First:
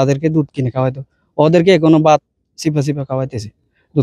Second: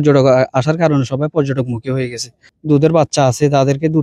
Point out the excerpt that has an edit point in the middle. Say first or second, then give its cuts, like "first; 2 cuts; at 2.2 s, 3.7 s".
second; 1 cut; at 2.5 s